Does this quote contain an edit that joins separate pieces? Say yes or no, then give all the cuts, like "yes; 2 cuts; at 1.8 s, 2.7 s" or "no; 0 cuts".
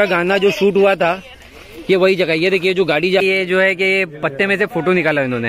yes; 1 cut; at 3.2 s